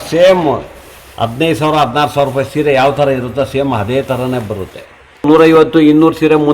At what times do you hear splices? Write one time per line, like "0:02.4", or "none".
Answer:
0:05.2